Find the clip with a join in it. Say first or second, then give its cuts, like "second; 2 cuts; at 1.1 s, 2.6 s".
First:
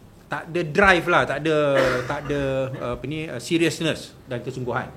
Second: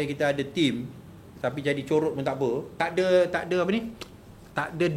second; 1 cut; at 2.7 s